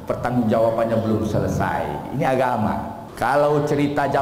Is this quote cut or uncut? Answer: cut